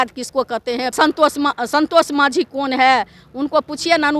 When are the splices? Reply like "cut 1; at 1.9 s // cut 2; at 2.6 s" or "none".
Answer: cut 1; at 0.9 s